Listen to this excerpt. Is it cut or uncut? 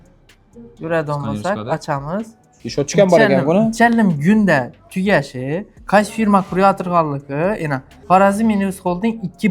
cut